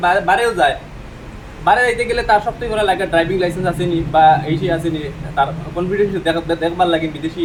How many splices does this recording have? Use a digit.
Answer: 0